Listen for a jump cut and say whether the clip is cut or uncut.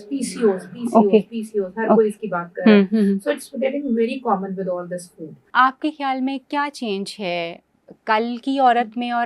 cut